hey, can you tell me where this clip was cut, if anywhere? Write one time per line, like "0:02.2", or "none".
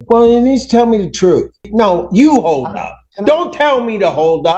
0:01.7